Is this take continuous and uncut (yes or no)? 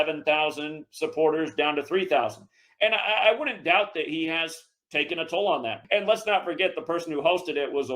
no